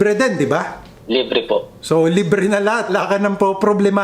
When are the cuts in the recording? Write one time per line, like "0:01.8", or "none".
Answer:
0:01.4
0:02.9

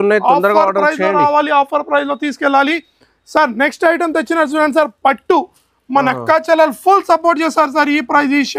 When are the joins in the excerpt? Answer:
none

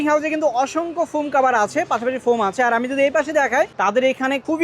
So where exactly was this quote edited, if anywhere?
0:03.7

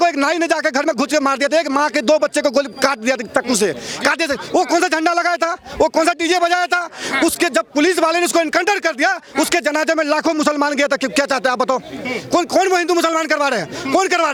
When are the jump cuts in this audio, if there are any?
none

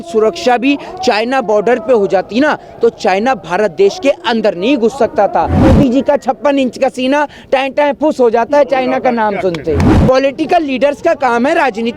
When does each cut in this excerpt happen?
0:05.6
0:09.9

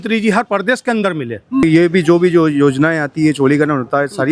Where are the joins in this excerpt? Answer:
0:01.6

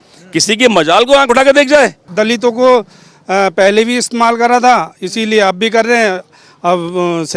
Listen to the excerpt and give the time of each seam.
0:02.0

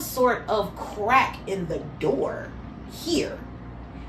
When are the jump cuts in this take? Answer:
none

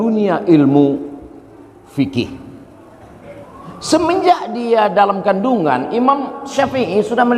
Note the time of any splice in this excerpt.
0:03.4

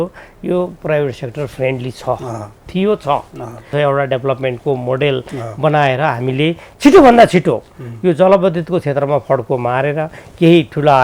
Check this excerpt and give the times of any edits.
0:03.7

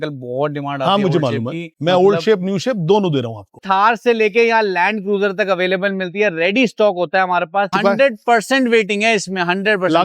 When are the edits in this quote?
0:03.6
0:07.7

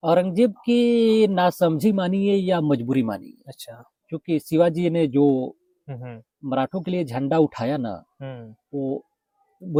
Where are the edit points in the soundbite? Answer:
none

